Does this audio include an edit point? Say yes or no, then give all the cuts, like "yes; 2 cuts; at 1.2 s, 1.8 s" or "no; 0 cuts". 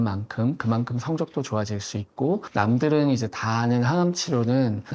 no; 0 cuts